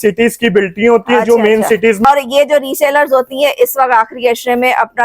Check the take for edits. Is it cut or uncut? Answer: cut